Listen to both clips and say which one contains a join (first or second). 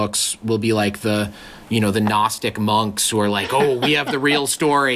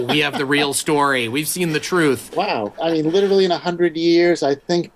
second